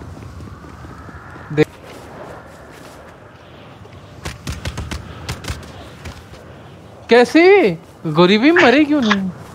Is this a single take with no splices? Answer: no; 1 cut; at 1.6 s

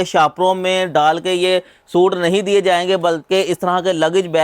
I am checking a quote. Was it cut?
no; 0 cuts

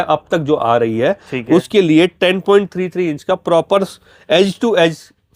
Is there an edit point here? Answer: no; 0 cuts

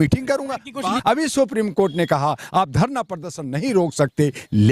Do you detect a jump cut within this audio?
yes; 1 cut; at 1.0 s

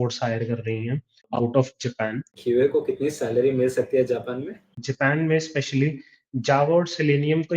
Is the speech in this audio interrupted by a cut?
yes; 3 cuts; at 1.3 s, 2.4 s, 4.9 s

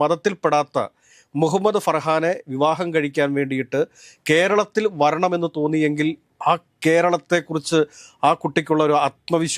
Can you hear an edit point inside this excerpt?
no; 0 cuts

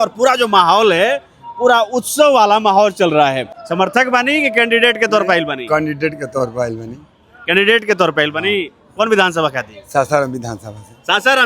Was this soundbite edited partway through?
yes; 1 cut; at 3.5 s

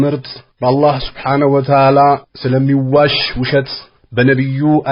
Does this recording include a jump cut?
no; 0 cuts

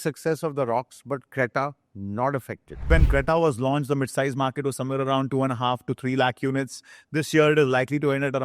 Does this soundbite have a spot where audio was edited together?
yes; 1 cut; at 2.9 s

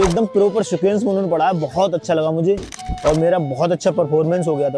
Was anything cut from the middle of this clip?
no; 0 cuts

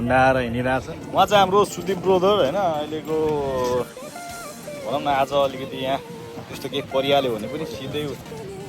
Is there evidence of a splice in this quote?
yes; 1 cut; at 1.0 s

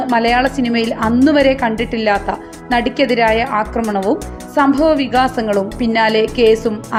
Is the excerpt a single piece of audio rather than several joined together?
yes; 0 cuts

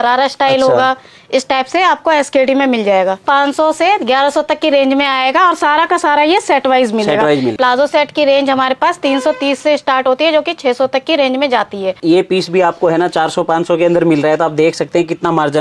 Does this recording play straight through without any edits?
no; 3 cuts; at 3.2 s, 7.5 s, 12.0 s

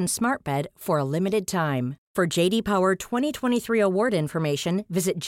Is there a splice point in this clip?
no; 0 cuts

